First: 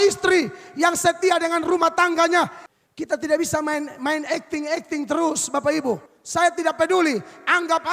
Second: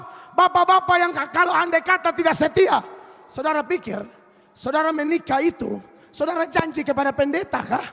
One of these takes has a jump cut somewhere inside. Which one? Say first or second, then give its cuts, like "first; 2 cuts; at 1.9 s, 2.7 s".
first; 2 cuts; at 2.6 s, 6.1 s